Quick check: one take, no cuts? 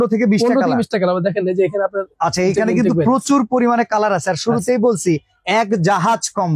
yes; 0 cuts

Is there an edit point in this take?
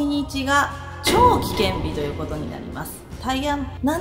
yes; 1 cut; at 3.1 s

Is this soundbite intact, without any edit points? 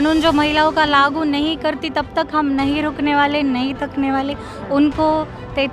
yes; 0 cuts

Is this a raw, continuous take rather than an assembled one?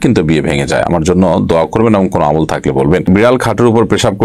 no; 1 cut; at 3.1 s

